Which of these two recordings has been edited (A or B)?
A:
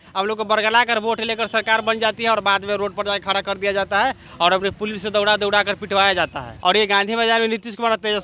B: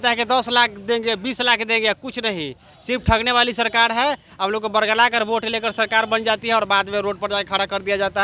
A